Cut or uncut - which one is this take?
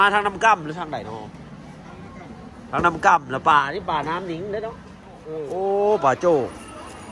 cut